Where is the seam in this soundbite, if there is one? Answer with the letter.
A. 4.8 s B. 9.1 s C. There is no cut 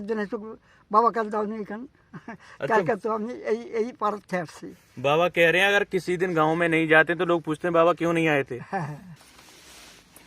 B